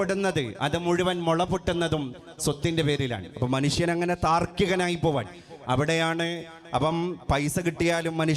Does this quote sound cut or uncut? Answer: uncut